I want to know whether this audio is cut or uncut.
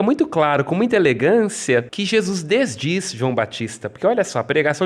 cut